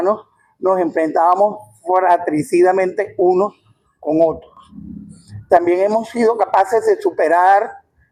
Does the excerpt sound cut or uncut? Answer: uncut